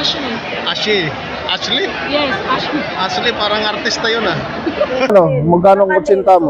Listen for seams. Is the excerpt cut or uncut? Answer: cut